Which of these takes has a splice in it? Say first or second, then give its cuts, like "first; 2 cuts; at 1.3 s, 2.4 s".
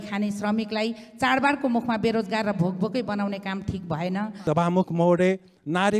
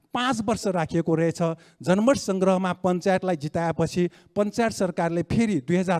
first; 1 cut; at 4.3 s